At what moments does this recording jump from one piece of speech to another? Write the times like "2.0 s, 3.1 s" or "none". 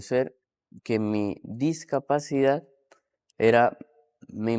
none